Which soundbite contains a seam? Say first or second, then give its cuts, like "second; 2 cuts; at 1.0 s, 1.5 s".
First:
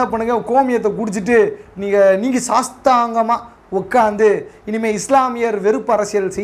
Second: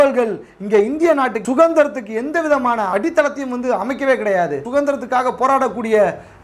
second; 3 cuts; at 1.4 s, 2.9 s, 4.6 s